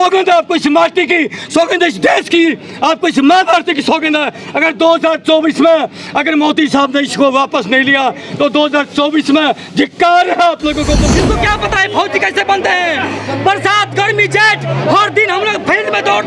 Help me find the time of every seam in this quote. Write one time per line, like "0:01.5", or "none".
0:11.0